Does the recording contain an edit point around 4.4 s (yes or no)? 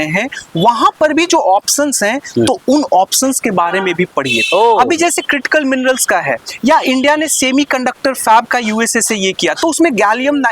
no